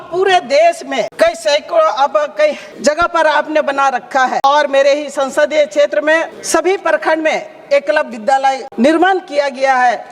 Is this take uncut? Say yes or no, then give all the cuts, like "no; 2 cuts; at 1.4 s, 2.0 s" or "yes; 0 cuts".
no; 5 cuts; at 1.1 s, 2.7 s, 4.4 s, 6.4 s, 8.7 s